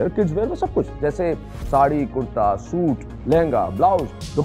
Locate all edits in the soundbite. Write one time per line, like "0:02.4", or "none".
none